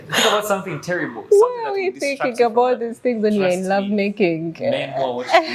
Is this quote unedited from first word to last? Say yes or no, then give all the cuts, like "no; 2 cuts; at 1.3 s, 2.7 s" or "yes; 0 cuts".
yes; 0 cuts